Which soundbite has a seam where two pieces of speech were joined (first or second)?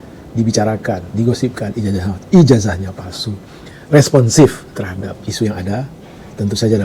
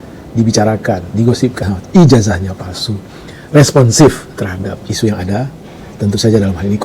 second